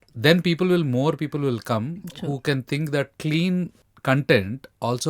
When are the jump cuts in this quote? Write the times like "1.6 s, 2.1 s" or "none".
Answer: 3.8 s